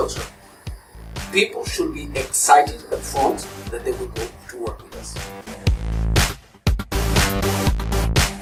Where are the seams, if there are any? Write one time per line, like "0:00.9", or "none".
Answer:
none